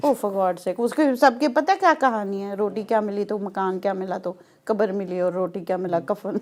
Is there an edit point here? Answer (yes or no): no